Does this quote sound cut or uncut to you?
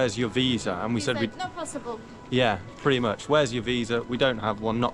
uncut